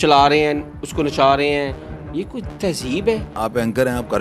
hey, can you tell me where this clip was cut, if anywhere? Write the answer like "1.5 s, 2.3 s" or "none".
3.3 s